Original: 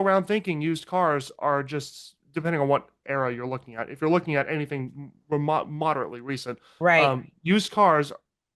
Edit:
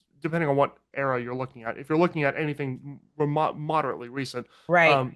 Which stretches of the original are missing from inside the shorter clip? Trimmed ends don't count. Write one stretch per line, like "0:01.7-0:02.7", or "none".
none

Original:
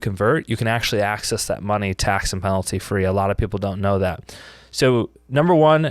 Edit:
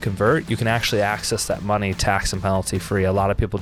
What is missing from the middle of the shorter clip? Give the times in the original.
none

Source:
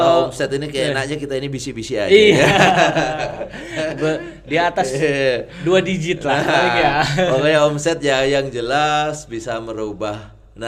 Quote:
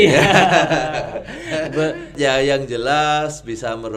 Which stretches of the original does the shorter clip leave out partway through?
0:04.4-0:08.0

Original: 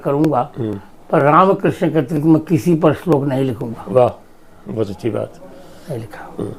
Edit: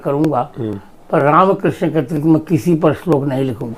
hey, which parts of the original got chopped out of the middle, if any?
none

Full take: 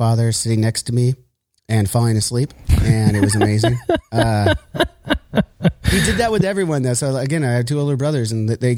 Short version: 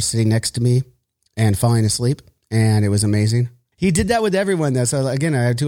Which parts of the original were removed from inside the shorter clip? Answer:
0:03.9-0:05.7

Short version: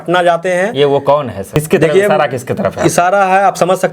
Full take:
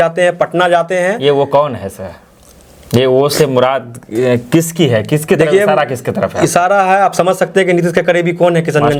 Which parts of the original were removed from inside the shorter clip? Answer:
0:02.0-0:05.1

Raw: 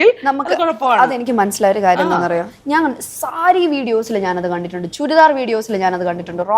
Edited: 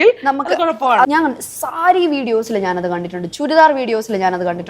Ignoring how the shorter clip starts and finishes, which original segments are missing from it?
0:01.1-0:02.7

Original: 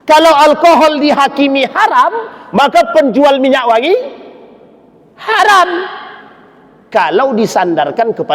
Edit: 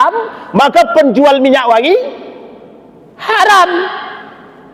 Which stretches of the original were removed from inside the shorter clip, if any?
none

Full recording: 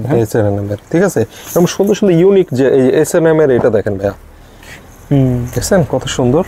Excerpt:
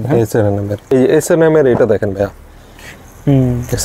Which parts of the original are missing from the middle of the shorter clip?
0:00.9-0:02.7

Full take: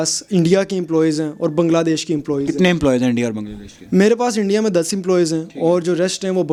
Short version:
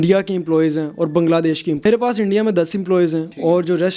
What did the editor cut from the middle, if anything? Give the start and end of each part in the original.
0:02.3-0:04.0

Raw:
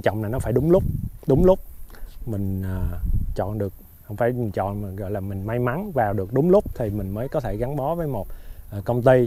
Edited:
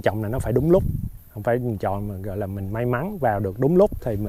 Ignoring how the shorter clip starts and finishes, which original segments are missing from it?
0:01.1-0:03.8

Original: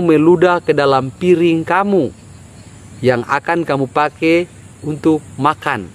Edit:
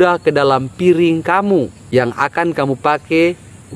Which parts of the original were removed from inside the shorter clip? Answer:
0:02.2-0:02.9

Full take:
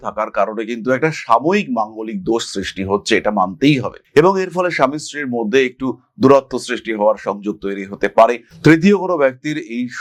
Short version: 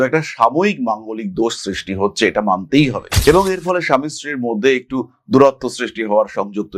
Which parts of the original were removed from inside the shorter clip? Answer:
none

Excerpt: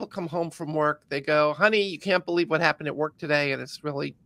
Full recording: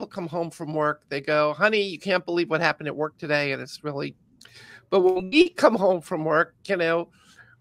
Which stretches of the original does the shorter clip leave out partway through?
none

